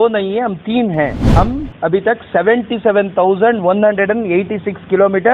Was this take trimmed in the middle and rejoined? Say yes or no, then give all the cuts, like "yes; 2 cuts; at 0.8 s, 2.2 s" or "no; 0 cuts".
yes; 1 cut; at 1.2 s